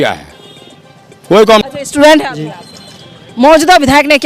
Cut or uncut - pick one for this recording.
cut